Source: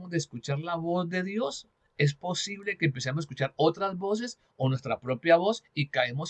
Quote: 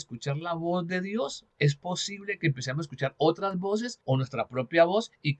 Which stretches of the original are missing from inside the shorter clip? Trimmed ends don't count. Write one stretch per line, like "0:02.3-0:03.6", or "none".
0:01.7-0:01.8
0:04.3-0:04.5